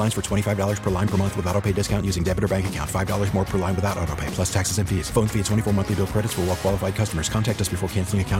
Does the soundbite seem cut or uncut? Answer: uncut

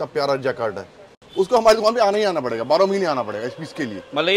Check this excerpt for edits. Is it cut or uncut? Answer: uncut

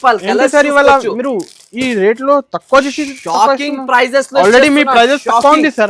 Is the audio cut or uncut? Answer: uncut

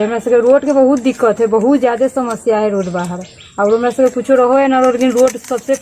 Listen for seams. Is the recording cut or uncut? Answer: uncut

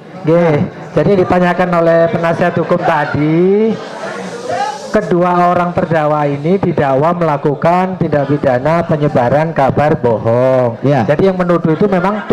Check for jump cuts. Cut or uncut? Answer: uncut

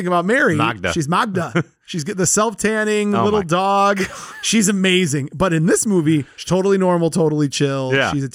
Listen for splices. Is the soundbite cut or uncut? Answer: uncut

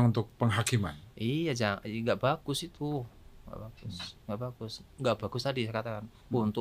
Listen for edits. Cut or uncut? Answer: uncut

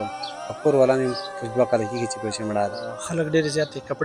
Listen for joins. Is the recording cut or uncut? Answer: cut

